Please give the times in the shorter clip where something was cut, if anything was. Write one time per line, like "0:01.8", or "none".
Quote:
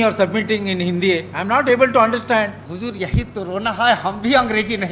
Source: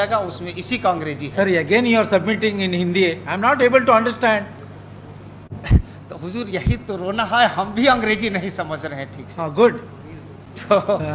0:02.6